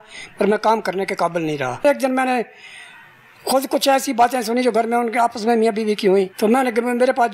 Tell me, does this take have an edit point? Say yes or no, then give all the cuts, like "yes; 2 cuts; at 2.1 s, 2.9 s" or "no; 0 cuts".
yes; 2 cuts; at 1.8 s, 6.3 s